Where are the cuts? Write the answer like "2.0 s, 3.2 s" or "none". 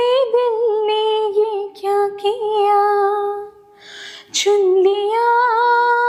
none